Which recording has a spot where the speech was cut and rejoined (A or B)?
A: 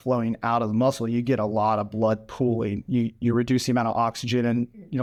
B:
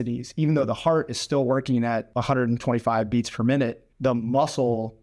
B